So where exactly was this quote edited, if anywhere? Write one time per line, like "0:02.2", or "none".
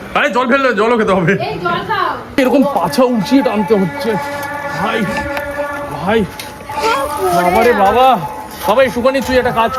0:02.4